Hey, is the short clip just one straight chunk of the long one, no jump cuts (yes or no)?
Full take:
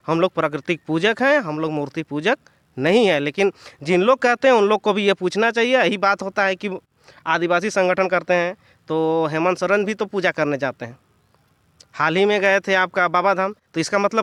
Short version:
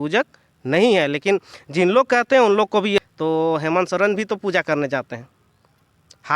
no